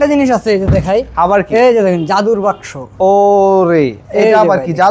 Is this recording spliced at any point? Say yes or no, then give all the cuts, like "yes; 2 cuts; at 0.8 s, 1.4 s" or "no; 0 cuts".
no; 0 cuts